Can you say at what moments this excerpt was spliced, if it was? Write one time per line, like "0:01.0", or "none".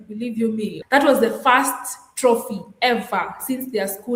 none